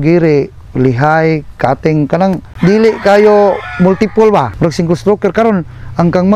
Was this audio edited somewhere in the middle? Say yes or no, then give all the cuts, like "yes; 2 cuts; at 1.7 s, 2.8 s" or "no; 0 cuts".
yes; 1 cut; at 2.5 s